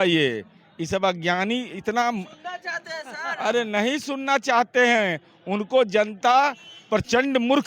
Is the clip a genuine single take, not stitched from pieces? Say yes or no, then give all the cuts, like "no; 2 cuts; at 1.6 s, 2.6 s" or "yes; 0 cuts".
yes; 0 cuts